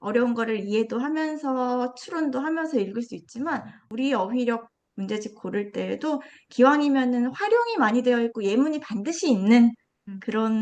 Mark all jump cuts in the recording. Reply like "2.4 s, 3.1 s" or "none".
3.8 s